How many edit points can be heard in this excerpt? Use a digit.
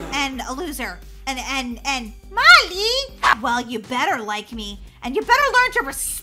1